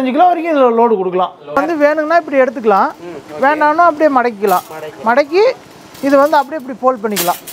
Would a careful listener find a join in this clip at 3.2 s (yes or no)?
no